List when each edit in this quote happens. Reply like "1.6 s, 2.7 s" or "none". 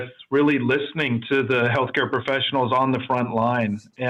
none